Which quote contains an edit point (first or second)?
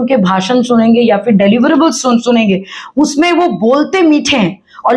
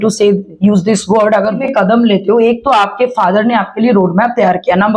second